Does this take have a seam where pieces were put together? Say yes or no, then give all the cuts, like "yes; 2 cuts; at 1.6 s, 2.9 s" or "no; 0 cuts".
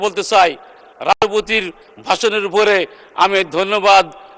no; 0 cuts